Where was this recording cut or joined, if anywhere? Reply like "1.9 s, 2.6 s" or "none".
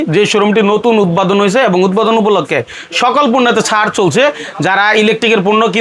none